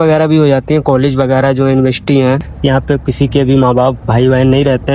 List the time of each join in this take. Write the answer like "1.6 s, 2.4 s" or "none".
2.5 s